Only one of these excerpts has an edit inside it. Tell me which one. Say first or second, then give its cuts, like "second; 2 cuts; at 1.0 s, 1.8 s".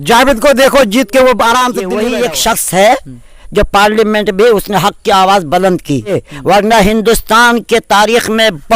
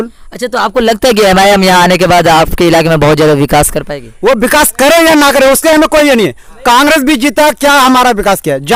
first; 2 cuts; at 1.9 s, 6.3 s